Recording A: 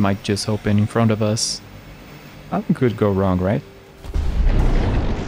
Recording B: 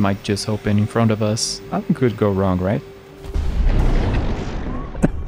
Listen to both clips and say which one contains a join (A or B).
B